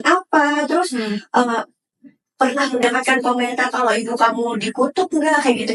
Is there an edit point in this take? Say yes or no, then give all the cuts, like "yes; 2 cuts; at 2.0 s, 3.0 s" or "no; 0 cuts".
no; 0 cuts